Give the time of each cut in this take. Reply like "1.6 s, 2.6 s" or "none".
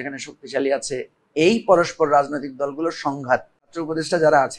1.2 s, 3.8 s